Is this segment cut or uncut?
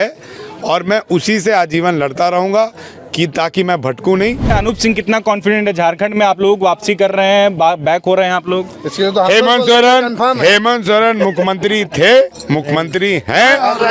cut